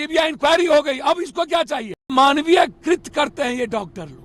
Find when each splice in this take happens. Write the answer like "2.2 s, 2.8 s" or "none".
2.1 s